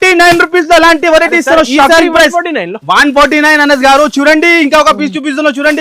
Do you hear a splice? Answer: no; 0 cuts

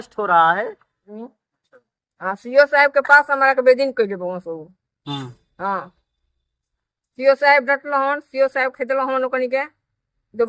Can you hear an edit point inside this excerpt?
yes; 1 cut; at 1.2 s

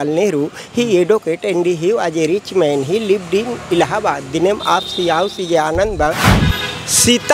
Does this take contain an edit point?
yes; 1 cut; at 6.3 s

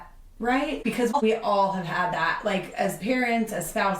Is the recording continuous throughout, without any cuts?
no; 1 cut; at 1.2 s

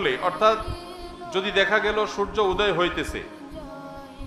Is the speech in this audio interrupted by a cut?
no; 0 cuts

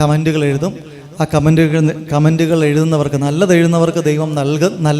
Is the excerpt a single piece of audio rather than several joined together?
yes; 0 cuts

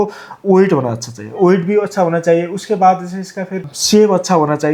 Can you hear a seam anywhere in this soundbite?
yes; 1 cut; at 3.7 s

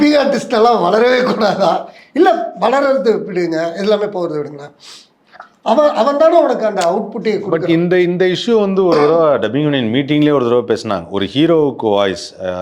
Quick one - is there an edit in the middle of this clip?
no; 0 cuts

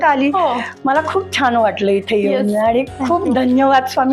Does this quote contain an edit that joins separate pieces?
no; 0 cuts

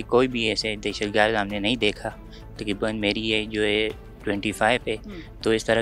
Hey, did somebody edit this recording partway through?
no; 0 cuts

